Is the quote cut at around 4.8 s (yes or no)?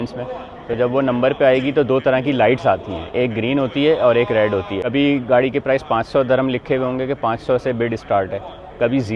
yes